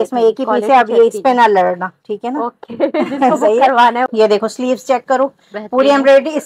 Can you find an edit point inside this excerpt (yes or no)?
yes